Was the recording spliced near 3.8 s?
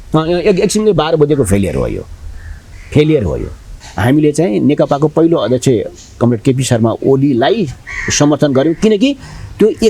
yes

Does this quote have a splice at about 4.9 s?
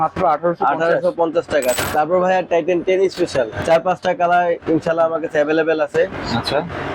no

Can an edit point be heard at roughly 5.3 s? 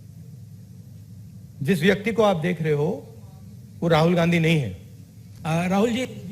yes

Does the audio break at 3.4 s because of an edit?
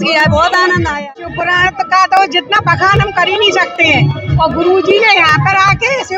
no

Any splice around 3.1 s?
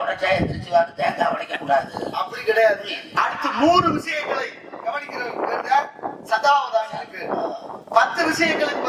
yes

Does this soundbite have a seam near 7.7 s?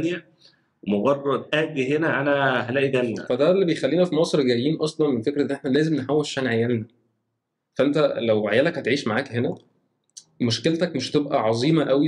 no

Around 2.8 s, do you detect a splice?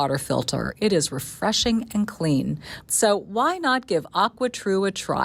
yes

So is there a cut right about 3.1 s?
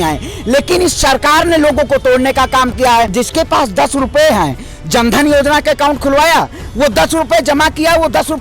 yes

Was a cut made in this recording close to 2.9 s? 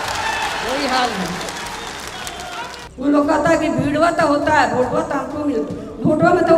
yes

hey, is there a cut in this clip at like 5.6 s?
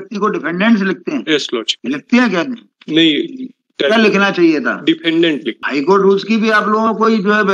yes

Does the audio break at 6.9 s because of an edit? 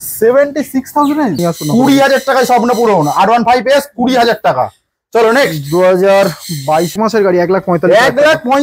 yes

